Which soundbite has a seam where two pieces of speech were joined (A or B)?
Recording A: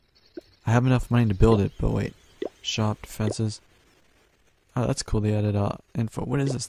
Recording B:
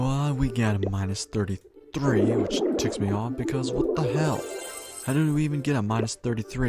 B